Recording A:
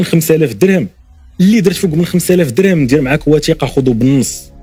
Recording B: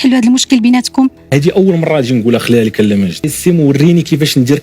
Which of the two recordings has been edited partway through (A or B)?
B